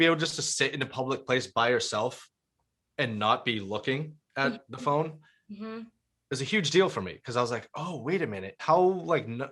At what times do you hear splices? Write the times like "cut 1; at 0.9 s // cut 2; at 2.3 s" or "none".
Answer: cut 1; at 8.5 s